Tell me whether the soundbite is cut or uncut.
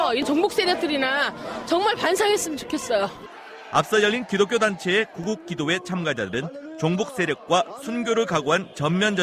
uncut